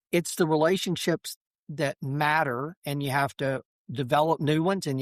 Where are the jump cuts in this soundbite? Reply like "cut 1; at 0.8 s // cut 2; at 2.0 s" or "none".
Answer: cut 1; at 1.3 s // cut 2; at 3.8 s